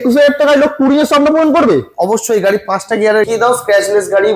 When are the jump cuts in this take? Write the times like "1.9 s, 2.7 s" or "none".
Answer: 3.3 s